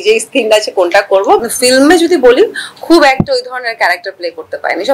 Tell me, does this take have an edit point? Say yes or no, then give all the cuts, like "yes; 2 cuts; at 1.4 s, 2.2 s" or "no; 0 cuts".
yes; 1 cut; at 1.4 s